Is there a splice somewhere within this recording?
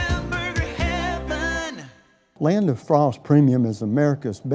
yes; 1 cut; at 2.2 s

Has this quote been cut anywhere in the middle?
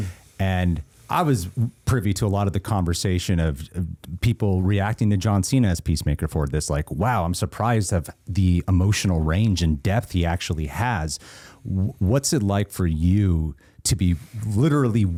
no; 0 cuts

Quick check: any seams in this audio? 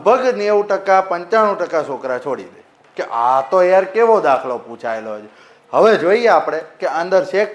no; 0 cuts

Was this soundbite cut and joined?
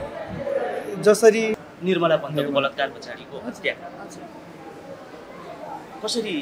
yes; 1 cut; at 1.6 s

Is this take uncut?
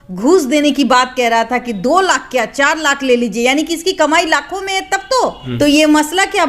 no; 1 cut; at 5.4 s

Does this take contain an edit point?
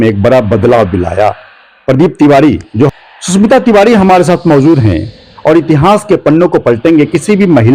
yes; 1 cut; at 2.9 s

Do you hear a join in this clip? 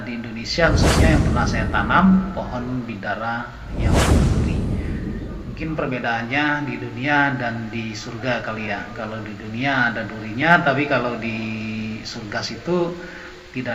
no; 0 cuts

